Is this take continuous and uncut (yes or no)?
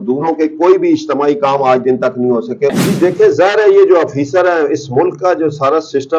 no